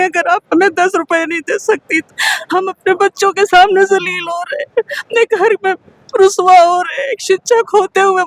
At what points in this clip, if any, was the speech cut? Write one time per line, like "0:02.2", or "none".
none